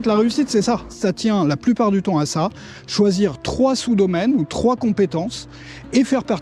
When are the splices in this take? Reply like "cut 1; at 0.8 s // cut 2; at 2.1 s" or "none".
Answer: cut 1; at 1.0 s